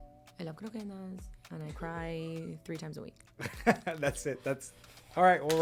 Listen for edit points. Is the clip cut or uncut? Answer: uncut